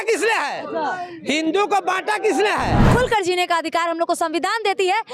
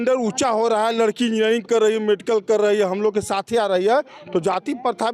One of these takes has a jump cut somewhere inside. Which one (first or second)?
first